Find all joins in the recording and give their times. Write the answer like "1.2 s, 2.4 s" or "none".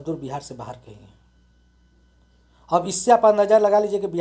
none